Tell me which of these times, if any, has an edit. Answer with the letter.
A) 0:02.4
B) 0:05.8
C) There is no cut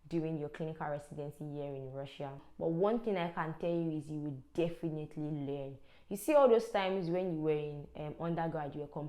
A